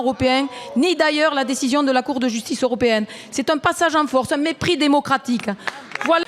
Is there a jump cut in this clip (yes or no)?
no